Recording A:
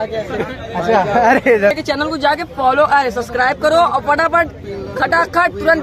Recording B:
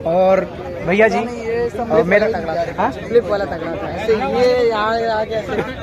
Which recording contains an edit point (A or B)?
A